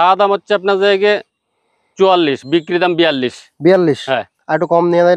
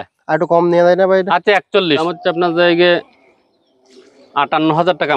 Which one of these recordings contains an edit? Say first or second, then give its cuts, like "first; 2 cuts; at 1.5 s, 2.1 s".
second; 1 cut; at 2.1 s